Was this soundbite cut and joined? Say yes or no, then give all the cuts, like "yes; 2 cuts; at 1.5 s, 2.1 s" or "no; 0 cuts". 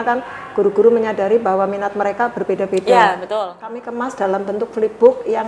yes; 1 cut; at 3.9 s